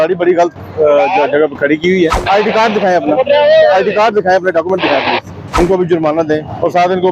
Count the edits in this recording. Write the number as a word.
two